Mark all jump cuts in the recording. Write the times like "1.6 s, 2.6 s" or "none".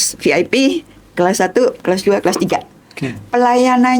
none